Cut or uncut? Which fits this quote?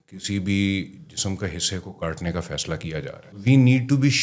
cut